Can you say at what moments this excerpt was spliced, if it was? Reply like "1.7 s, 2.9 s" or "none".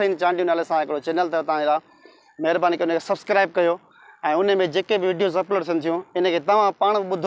none